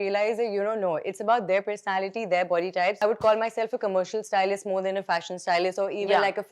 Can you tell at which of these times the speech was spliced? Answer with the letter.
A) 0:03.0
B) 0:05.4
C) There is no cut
A